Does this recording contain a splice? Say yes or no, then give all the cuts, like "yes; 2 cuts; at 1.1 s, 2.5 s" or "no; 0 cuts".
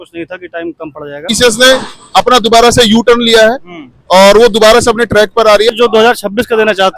yes; 2 cuts; at 1.3 s, 5.7 s